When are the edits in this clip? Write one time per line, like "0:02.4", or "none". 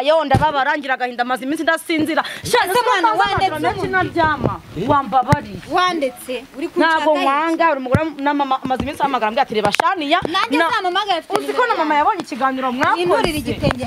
none